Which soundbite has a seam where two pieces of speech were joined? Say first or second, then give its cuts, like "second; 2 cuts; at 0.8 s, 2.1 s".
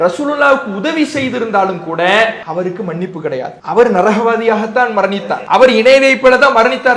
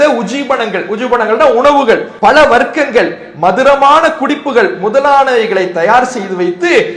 first; 3 cuts; at 2.4 s, 3.6 s, 5.3 s